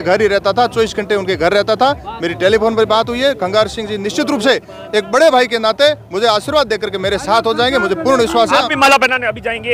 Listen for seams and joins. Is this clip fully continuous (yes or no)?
yes